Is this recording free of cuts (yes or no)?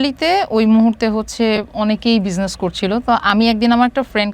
yes